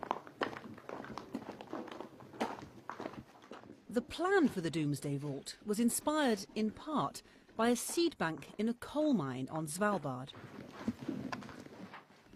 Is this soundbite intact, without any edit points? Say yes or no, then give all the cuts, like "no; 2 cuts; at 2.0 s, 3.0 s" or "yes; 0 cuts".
yes; 0 cuts